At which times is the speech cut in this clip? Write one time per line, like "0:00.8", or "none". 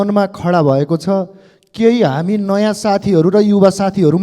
none